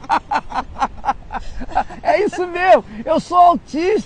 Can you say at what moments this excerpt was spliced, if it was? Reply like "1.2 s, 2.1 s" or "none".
none